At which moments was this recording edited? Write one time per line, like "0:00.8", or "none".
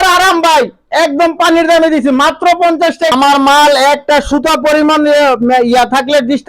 0:03.1